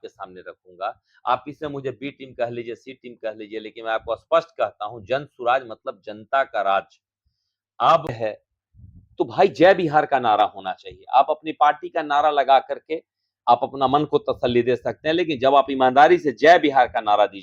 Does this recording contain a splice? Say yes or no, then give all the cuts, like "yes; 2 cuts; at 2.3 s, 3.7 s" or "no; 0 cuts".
yes; 1 cut; at 8.2 s